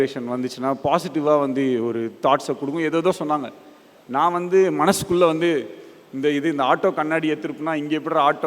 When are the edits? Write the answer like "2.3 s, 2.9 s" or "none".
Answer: none